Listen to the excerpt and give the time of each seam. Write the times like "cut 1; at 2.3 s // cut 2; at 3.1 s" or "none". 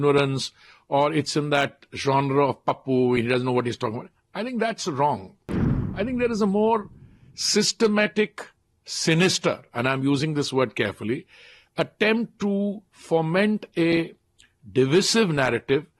none